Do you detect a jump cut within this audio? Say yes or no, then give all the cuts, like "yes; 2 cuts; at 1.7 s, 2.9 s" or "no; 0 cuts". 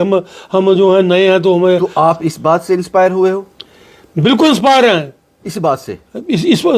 no; 0 cuts